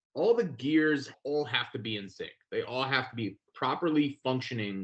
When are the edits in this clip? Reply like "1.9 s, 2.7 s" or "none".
1.1 s, 3.5 s